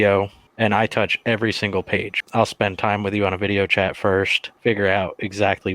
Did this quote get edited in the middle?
yes; 1 cut; at 4.4 s

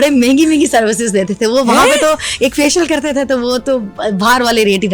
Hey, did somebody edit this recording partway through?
no; 0 cuts

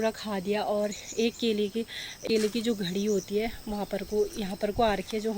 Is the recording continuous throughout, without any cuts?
no; 1 cut; at 2.2 s

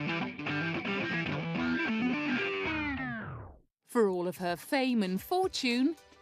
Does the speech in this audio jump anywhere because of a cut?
no; 0 cuts

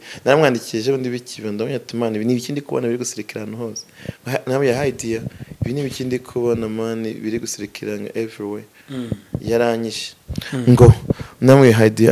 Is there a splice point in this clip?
no; 0 cuts

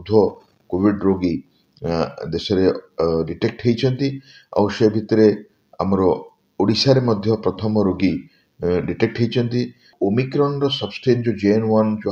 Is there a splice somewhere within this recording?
yes; 1 cut; at 9.9 s

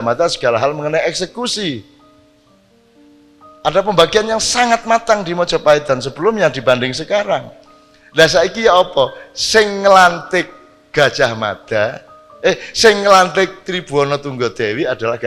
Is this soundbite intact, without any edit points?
yes; 0 cuts

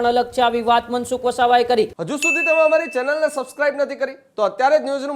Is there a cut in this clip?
yes; 1 cut; at 2.0 s

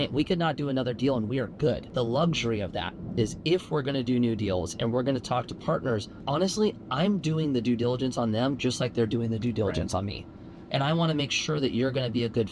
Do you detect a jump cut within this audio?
no; 0 cuts

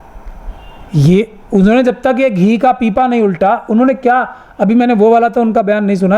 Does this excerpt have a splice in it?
no; 0 cuts

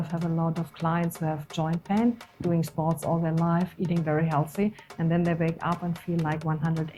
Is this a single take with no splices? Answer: yes; 0 cuts

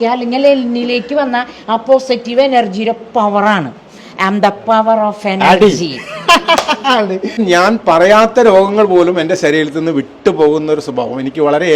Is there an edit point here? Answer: yes; 1 cut; at 7.4 s

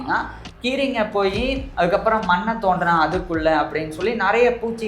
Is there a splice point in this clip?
yes; 1 cut; at 1.6 s

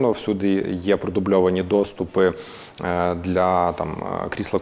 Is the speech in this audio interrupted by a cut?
no; 0 cuts

